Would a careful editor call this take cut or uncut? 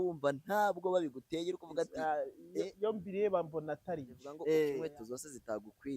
cut